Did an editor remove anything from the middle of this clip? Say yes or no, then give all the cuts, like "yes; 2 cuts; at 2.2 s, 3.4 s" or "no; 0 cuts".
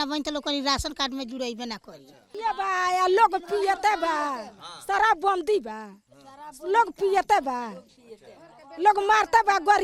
yes; 1 cut; at 2.3 s